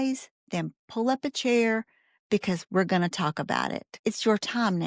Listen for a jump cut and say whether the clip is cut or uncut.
cut